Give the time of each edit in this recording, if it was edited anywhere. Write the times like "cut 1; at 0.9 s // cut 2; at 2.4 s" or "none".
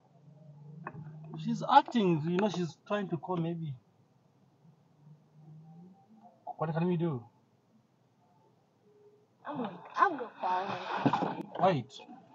none